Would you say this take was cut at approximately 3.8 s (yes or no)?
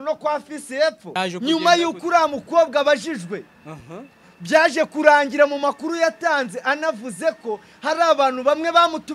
no